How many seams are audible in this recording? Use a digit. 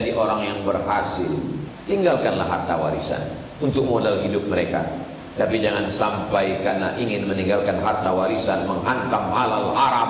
1